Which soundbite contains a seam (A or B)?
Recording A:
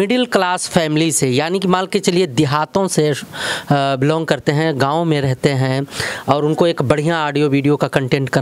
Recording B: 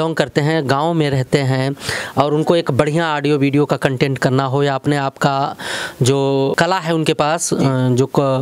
B